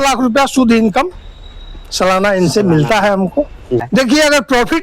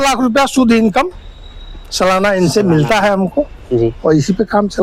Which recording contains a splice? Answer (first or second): first